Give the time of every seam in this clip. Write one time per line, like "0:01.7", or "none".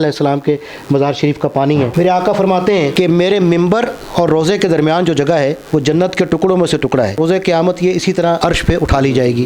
0:01.9
0:02.9
0:07.2
0:08.4